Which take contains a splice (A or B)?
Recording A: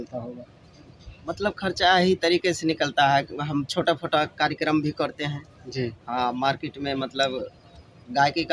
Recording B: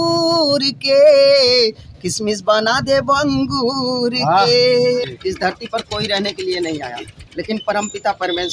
B